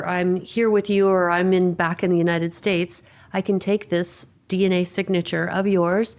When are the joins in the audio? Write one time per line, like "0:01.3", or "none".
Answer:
none